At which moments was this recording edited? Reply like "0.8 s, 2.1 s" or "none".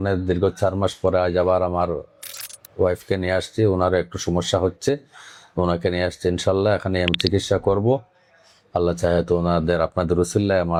none